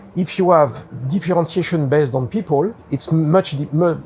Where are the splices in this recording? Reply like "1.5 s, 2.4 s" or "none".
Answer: 2.8 s